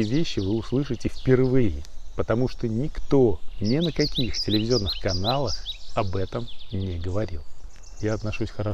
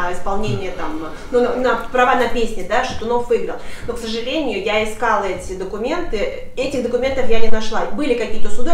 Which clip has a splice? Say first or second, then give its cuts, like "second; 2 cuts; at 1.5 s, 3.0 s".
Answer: first; 2 cuts; at 3.5 s, 7.8 s